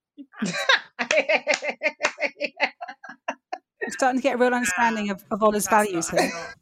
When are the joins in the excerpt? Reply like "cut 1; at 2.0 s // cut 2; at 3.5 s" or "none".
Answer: cut 1; at 3.8 s